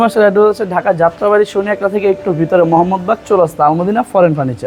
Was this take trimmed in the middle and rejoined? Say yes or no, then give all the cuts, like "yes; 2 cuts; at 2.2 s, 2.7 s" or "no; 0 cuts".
no; 0 cuts